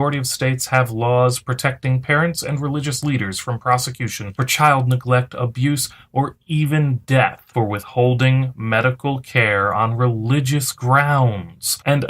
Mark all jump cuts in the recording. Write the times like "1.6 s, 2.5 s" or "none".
1.8 s